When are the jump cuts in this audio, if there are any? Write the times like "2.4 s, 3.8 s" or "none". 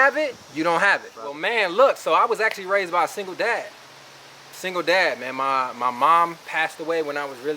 1.3 s